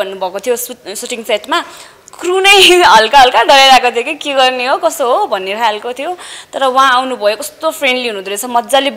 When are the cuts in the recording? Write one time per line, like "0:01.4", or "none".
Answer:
none